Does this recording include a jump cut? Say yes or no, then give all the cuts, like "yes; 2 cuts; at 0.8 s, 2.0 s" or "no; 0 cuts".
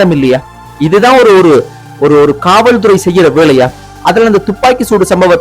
yes; 1 cut; at 3.9 s